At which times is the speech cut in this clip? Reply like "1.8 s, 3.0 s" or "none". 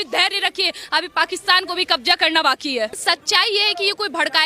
3.0 s